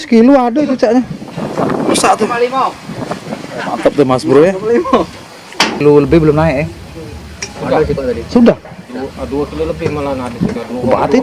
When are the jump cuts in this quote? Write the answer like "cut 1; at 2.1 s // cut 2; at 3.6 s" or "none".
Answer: cut 1; at 5.8 s